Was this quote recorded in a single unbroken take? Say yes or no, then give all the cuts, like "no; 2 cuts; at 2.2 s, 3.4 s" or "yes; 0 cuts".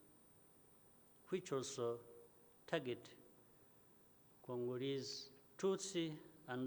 yes; 0 cuts